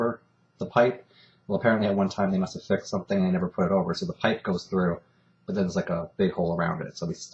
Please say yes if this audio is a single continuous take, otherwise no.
yes